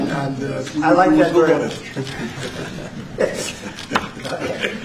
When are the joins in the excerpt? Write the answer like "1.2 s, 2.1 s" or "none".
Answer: none

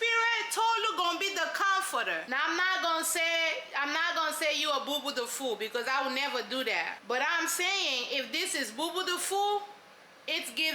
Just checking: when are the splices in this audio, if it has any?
2.2 s, 7.0 s

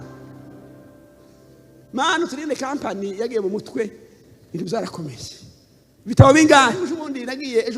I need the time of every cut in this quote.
6.8 s

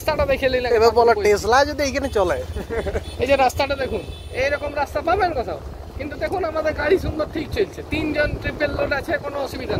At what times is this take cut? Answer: none

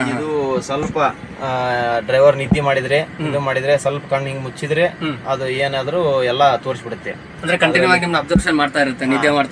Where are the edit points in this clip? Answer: none

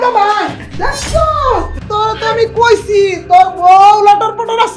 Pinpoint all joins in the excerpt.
1.8 s

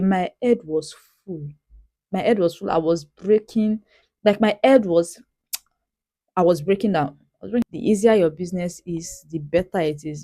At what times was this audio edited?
7.6 s

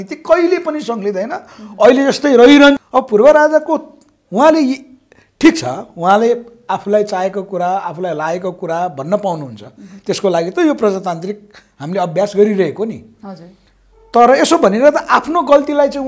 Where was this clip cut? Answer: 2.8 s

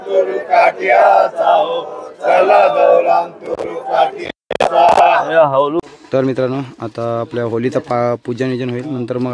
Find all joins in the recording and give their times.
5.8 s

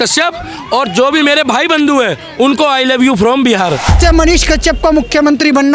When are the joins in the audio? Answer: 4.0 s

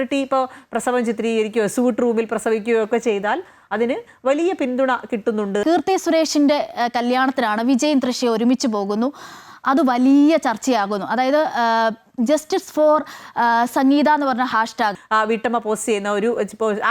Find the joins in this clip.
5.6 s, 15.0 s

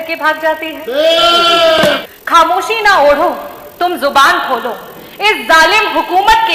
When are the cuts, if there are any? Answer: 2.0 s

